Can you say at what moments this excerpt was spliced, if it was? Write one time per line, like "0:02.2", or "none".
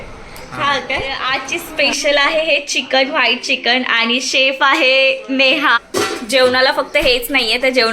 0:01.2
0:05.8